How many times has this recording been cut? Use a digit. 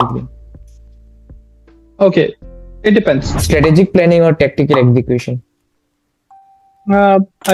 1